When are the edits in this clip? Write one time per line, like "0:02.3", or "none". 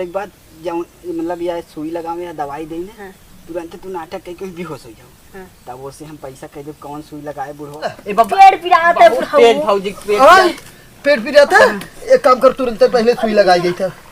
0:08.0